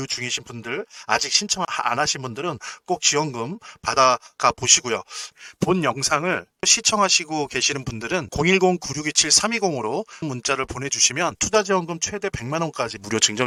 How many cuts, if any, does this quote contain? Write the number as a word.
zero